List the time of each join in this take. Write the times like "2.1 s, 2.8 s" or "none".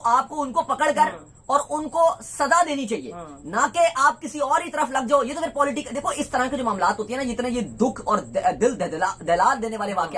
none